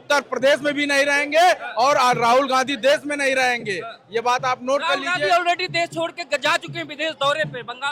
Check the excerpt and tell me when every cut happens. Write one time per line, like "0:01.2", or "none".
none